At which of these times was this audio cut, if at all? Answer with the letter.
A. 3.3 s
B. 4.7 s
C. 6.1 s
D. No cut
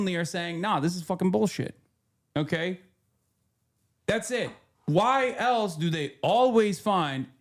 B